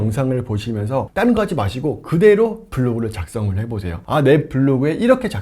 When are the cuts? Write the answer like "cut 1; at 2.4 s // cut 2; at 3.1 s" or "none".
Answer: cut 1; at 1.1 s // cut 2; at 3.9 s

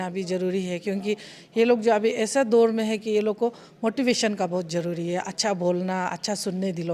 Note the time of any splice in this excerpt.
none

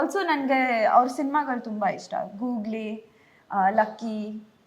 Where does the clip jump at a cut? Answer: none

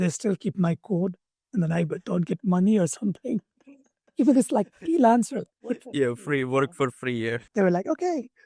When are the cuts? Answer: cut 1; at 7.4 s

